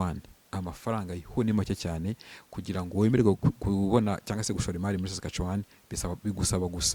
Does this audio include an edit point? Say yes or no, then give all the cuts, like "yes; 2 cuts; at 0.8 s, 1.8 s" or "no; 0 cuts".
no; 0 cuts